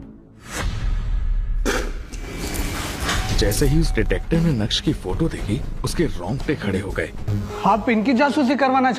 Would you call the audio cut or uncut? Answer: cut